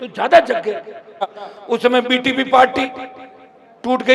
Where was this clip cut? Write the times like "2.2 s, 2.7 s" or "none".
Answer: 1.4 s